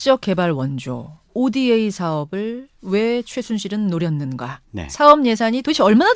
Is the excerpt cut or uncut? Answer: cut